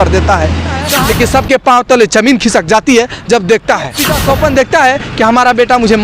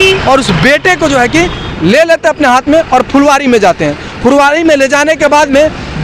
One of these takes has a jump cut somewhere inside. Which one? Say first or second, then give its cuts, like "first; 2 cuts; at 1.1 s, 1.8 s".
first; 2 cuts; at 0.9 s, 4.1 s